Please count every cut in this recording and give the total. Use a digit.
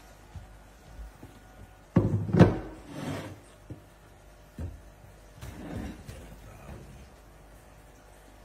1